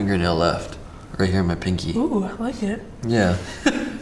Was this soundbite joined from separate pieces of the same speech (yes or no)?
no